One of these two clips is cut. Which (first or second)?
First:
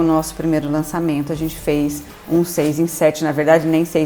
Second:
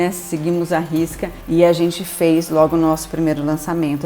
second